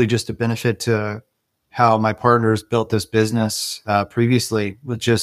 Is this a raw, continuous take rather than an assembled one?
yes; 0 cuts

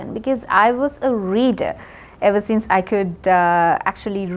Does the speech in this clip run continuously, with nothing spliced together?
yes; 0 cuts

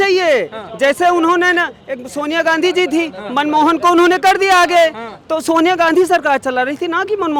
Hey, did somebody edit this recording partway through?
no; 0 cuts

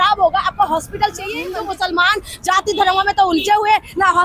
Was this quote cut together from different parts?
yes; 1 cut; at 1.5 s

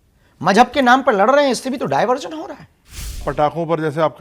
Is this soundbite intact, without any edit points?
no; 1 cut; at 3.2 s

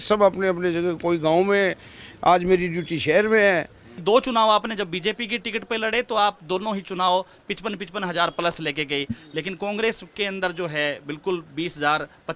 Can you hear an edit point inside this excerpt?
yes; 1 cut; at 3.9 s

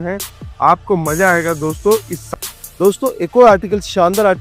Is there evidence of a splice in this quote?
yes; 1 cut; at 2.2 s

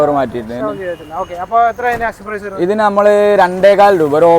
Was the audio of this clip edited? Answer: no; 0 cuts

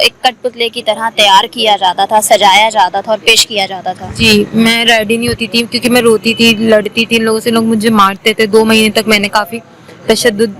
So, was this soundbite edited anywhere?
no; 0 cuts

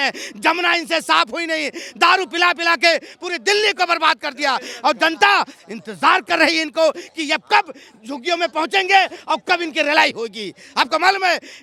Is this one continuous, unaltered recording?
yes; 0 cuts

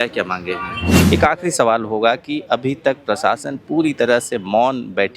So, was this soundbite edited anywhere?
yes; 1 cut; at 1.0 s

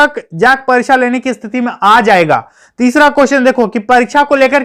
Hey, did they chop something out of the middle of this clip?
yes; 1 cut; at 2.6 s

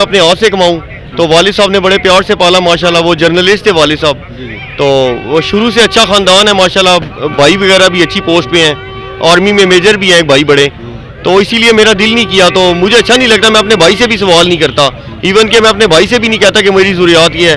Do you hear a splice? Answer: no; 0 cuts

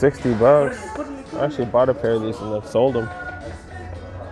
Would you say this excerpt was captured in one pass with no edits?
yes; 0 cuts

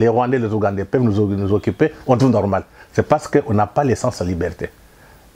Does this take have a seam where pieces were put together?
no; 0 cuts

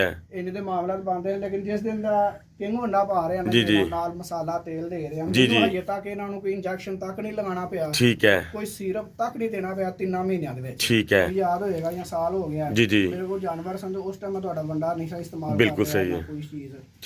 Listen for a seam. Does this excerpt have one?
yes; 1 cut; at 11.3 s

